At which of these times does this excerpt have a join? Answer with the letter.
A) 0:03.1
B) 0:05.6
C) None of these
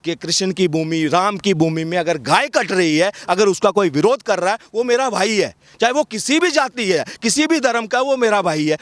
C